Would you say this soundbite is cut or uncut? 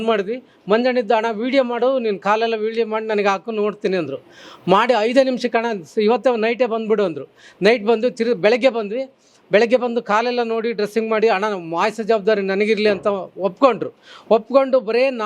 uncut